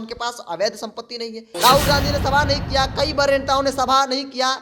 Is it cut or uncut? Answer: cut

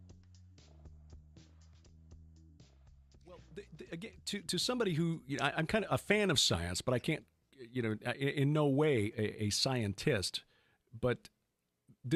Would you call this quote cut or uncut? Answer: uncut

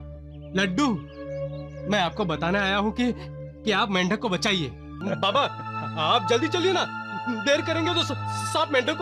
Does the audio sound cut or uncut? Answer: cut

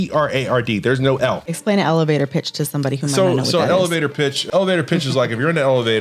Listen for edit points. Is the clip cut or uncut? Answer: cut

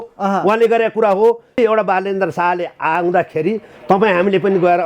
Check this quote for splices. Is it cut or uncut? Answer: cut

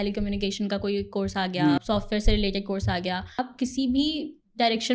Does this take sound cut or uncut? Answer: cut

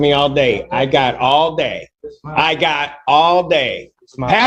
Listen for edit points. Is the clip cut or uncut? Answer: uncut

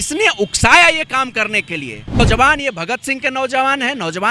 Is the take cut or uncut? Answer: cut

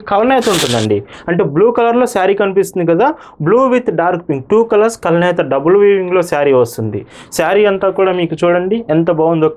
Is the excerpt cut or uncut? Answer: uncut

